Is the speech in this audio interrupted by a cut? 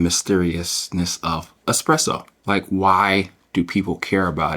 yes; 2 cuts; at 1.5 s, 2.3 s

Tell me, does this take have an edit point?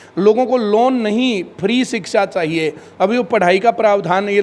no; 0 cuts

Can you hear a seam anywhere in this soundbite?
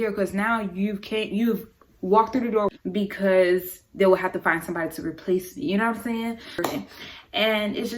yes; 2 cuts; at 2.7 s, 6.7 s

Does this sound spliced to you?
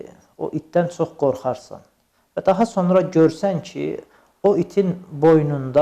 no; 0 cuts

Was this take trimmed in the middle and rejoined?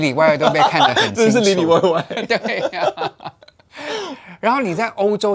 no; 0 cuts

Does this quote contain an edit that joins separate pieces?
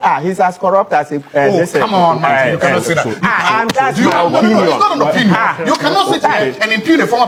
no; 0 cuts

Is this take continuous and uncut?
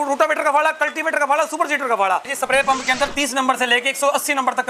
no; 1 cut; at 2.3 s

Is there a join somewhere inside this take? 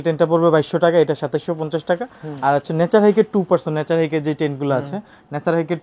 no; 0 cuts

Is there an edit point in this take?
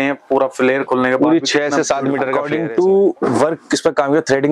yes; 1 cut; at 2.4 s

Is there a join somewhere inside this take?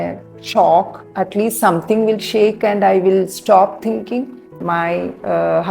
yes; 1 cut; at 4.6 s

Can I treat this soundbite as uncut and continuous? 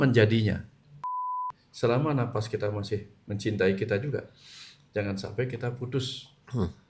no; 1 cut; at 1.3 s

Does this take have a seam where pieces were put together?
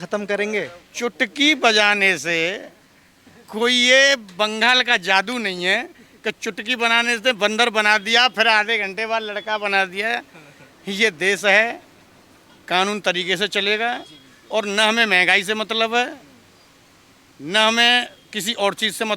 no; 0 cuts

